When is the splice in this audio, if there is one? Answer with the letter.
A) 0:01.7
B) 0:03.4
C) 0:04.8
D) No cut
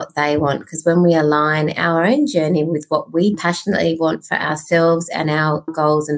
B